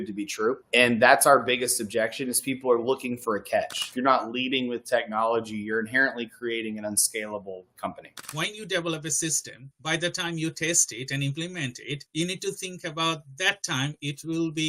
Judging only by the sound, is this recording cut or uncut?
cut